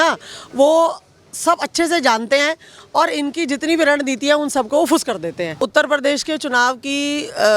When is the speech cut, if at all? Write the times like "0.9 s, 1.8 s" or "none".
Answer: 5.6 s